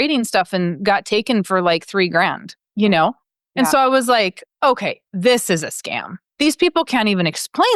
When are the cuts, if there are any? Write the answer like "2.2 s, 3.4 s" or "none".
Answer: none